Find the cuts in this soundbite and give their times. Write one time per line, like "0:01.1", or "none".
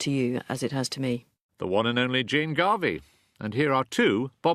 0:01.1